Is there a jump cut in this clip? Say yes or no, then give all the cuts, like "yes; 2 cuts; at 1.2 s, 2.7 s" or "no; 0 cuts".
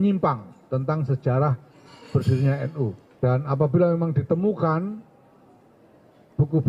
yes; 1 cut; at 3.0 s